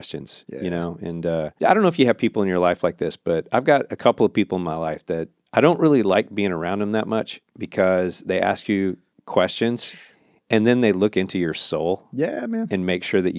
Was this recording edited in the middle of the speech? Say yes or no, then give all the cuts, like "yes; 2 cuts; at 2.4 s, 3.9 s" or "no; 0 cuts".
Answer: yes; 3 cuts; at 1.5 s, 5.4 s, 9.1 s